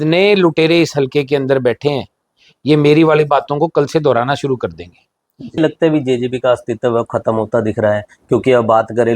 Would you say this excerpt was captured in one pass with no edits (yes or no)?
no